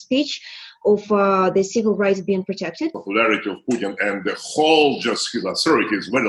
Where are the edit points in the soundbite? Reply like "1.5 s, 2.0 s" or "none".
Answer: 3.0 s